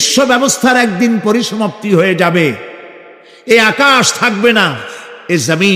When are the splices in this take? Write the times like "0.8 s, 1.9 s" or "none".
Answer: none